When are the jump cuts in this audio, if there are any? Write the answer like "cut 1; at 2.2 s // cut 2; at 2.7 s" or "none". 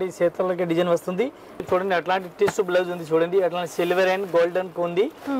cut 1; at 1.7 s